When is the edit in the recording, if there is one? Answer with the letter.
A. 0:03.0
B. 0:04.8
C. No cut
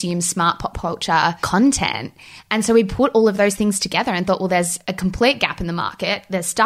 B